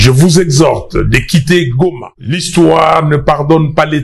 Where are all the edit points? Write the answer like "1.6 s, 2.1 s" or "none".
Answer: 2.1 s